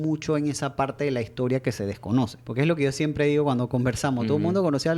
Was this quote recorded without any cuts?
no; 1 cut; at 2.4 s

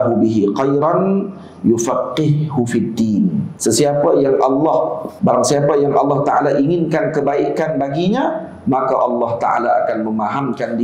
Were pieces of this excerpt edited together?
yes; 2 cuts; at 3.5 s, 5.0 s

